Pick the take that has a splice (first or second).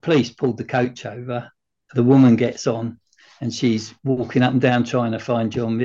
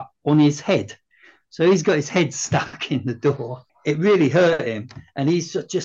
second